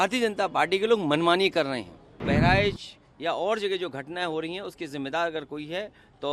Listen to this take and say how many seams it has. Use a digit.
1